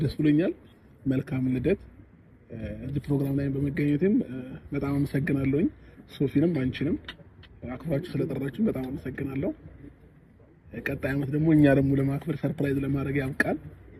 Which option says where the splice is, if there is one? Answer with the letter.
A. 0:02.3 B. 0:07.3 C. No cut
C